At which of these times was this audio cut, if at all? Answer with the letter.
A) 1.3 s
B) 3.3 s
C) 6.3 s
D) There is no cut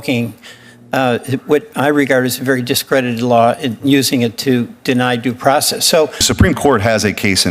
C